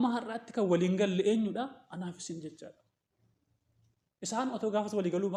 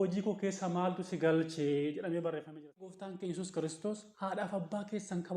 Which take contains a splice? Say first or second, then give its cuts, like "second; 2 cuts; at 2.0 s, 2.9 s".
second; 1 cut; at 2.9 s